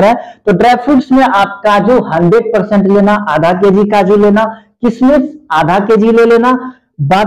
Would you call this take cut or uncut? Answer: uncut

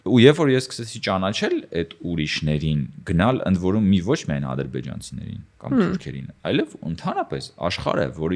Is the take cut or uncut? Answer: uncut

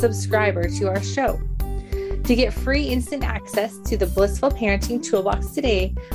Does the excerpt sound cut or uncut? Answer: uncut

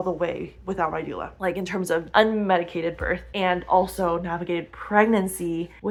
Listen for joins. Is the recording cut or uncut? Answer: uncut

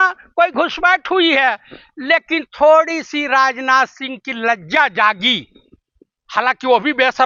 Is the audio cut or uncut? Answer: uncut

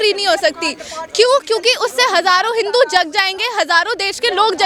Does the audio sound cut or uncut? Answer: uncut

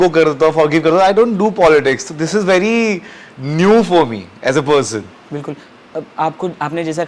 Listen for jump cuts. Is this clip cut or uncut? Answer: uncut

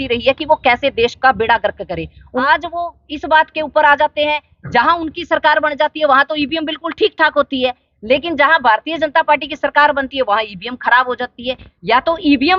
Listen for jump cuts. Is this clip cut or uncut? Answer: cut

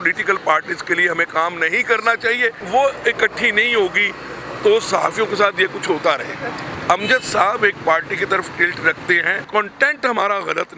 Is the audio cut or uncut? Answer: cut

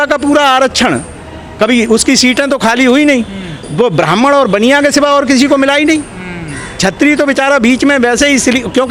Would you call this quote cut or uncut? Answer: uncut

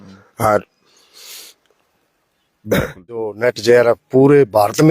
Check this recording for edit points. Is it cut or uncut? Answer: cut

